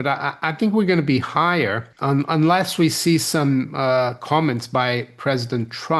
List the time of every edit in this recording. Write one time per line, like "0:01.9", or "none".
0:01.9